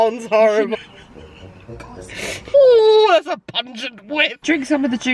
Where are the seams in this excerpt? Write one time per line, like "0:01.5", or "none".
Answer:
0:02.5
0:04.4